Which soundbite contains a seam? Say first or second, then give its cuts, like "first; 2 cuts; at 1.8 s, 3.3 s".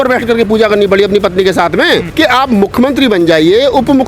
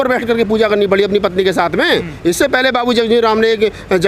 first; 1 cut; at 2.1 s